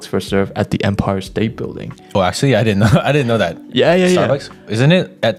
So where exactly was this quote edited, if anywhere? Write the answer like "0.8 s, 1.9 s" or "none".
none